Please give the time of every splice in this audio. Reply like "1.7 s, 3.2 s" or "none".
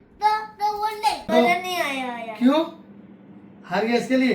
1.3 s